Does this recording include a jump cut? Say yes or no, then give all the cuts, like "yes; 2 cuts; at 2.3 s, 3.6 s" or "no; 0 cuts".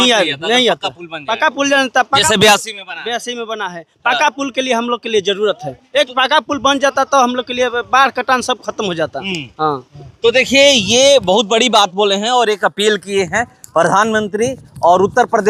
no; 0 cuts